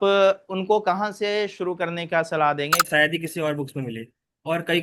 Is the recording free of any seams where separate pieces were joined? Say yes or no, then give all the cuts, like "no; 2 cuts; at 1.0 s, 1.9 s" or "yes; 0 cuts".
no; 1 cut; at 2.8 s